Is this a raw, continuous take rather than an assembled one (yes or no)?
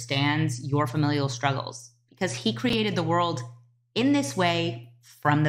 yes